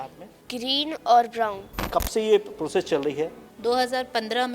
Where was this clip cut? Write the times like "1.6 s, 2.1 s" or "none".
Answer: 1.8 s, 3.4 s